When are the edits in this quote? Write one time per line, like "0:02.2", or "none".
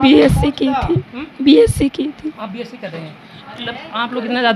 none